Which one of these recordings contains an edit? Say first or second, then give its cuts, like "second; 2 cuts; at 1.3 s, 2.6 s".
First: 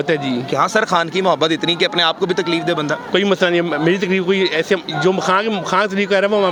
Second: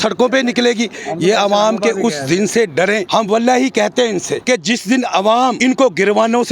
second; 3 cuts; at 3.0 s, 4.3 s, 5.6 s